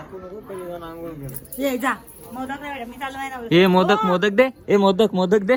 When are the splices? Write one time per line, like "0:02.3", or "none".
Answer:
none